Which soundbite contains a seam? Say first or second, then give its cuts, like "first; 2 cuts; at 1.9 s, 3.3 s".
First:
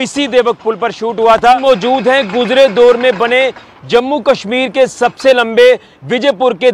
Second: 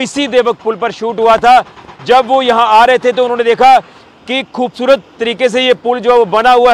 first; 1 cut; at 1.5 s